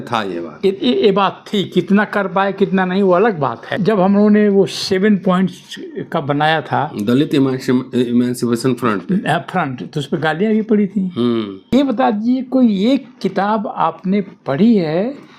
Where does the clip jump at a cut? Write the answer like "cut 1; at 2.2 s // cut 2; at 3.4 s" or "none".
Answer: cut 1; at 3.7 s // cut 2; at 11.6 s